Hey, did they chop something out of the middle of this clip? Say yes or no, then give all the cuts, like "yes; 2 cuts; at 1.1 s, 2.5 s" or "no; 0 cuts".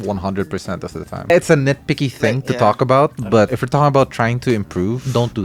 no; 0 cuts